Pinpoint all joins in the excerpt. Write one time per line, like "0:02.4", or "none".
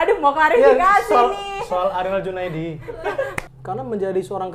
0:03.4